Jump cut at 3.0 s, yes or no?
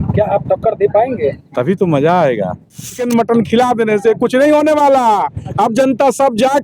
yes